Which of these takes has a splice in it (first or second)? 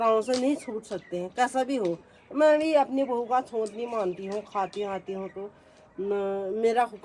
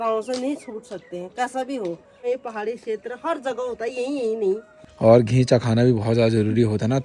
second